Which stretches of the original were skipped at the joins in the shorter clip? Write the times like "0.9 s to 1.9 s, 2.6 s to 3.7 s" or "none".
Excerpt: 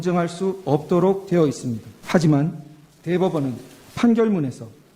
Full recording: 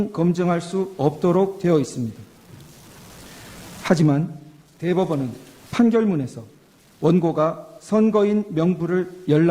2.2 s to 3.7 s